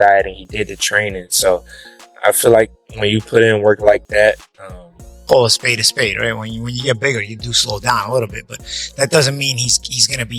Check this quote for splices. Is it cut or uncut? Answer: cut